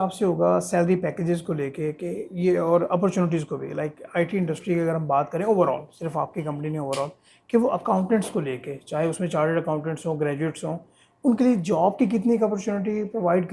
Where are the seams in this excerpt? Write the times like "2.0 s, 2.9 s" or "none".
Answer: none